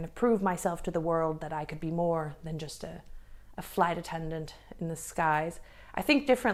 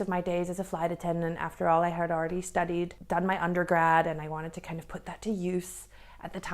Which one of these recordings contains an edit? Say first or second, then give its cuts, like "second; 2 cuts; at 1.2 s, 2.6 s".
second; 1 cut; at 3.0 s